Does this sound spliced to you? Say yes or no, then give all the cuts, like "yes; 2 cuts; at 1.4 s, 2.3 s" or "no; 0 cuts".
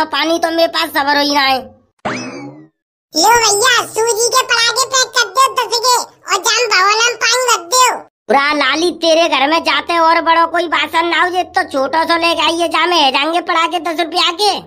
no; 0 cuts